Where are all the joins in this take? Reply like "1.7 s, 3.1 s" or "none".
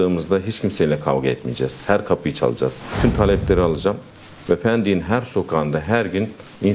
2.8 s